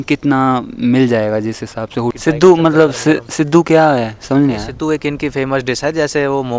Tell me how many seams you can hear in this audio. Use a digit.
1